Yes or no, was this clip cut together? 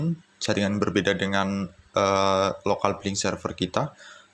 yes